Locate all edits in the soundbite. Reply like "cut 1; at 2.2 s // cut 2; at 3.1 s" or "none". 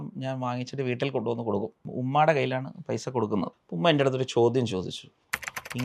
cut 1; at 1.8 s // cut 2; at 3.6 s